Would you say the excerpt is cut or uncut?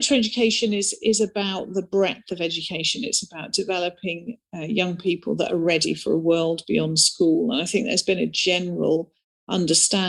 uncut